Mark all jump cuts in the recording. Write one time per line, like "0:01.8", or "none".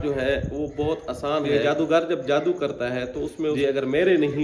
0:01.5
0:03.6